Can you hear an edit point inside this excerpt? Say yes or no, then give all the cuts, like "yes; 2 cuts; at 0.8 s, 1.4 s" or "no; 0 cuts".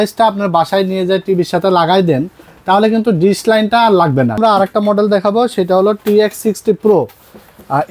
yes; 1 cut; at 4.4 s